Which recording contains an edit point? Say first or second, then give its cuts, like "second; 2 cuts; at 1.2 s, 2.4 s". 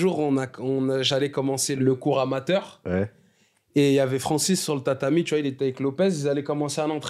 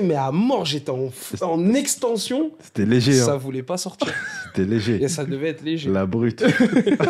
first; 1 cut; at 1.7 s